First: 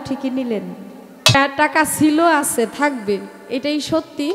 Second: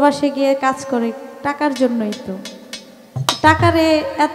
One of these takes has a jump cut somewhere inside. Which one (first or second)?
first